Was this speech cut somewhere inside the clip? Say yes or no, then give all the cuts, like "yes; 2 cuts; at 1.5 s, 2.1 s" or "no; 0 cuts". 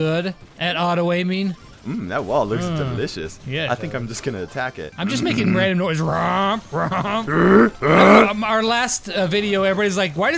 yes; 3 cuts; at 1.7 s, 4.9 s, 7.3 s